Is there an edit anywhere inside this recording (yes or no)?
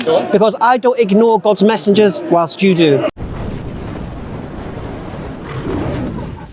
yes